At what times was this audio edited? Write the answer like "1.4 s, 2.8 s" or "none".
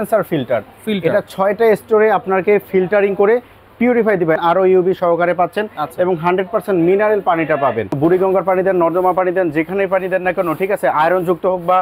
4.4 s, 8.0 s